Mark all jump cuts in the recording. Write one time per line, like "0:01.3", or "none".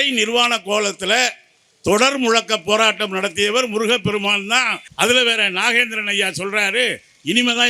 0:04.8